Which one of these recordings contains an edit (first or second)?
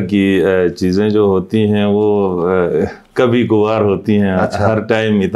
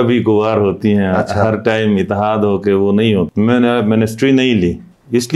second